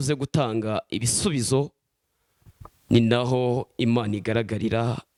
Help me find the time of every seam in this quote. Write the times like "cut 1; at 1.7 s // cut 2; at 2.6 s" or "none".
none